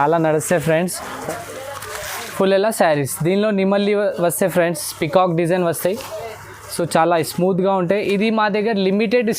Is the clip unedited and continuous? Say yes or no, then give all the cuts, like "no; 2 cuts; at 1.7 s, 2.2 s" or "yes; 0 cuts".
no; 1 cut; at 1.1 s